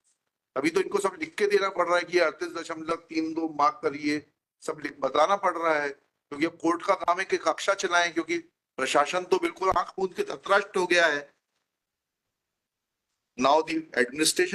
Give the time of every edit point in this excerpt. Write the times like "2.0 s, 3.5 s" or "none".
none